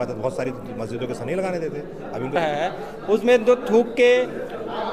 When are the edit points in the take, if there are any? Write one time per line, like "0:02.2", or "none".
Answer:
0:02.3